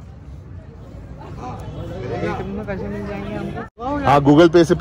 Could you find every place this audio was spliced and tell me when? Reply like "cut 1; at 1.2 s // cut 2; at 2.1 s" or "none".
cut 1; at 3.8 s